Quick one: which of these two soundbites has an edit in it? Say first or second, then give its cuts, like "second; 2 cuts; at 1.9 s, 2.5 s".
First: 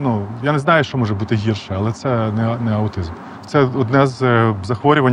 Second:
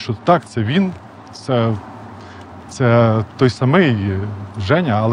first; 1 cut; at 3.4 s